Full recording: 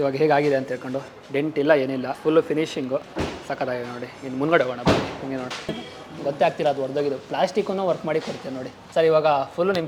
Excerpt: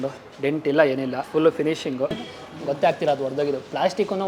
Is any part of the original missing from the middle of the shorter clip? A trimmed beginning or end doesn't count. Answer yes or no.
yes